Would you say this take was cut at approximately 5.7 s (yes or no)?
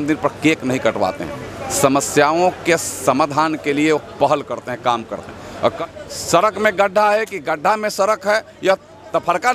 yes